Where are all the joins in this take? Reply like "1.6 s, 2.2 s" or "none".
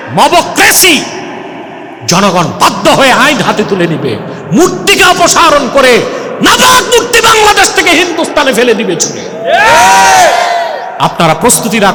none